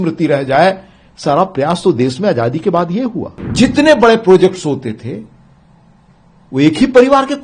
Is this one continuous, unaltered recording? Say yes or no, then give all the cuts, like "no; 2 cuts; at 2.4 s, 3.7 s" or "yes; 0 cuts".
no; 1 cut; at 3.4 s